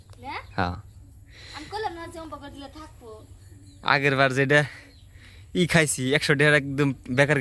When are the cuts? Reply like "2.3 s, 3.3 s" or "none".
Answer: none